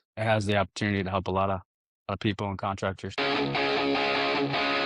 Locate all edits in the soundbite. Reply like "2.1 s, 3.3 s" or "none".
3.1 s